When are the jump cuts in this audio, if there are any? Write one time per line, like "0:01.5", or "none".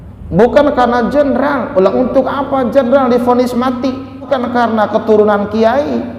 0:04.3